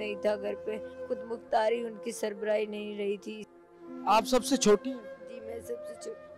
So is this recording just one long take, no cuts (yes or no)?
no